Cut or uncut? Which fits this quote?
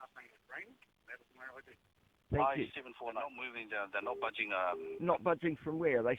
cut